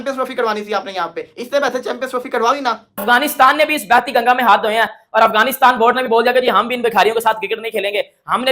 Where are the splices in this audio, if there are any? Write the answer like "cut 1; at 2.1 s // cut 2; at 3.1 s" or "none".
cut 1; at 2.9 s